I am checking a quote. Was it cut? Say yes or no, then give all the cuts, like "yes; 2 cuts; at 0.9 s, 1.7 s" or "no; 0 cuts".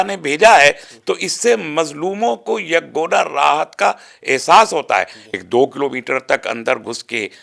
yes; 1 cut; at 5.2 s